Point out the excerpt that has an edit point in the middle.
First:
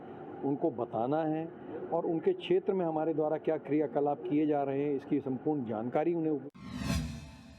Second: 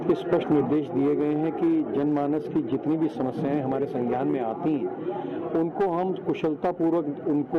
first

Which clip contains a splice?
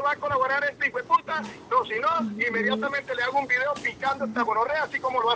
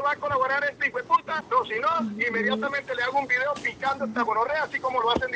second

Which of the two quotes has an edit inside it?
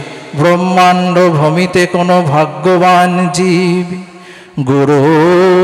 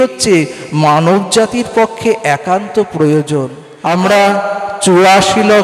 second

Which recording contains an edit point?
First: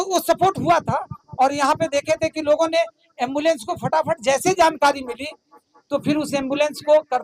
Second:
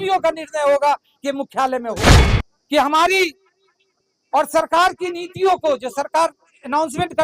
second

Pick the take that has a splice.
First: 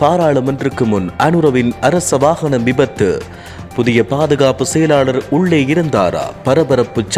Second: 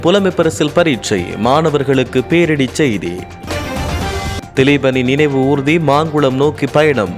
second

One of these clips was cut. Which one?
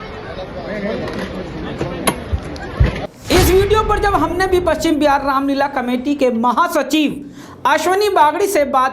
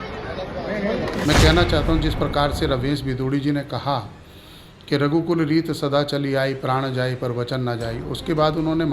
second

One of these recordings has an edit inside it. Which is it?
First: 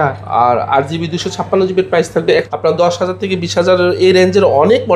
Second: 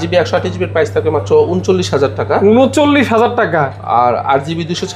first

